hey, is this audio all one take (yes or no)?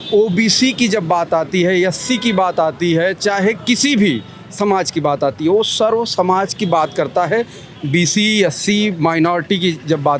yes